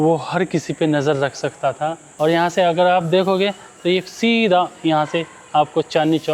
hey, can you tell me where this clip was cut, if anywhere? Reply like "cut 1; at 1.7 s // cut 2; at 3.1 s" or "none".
cut 1; at 2.0 s